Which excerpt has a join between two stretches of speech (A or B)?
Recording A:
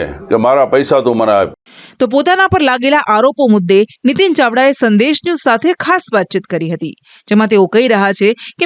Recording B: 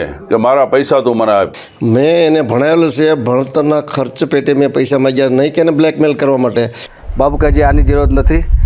B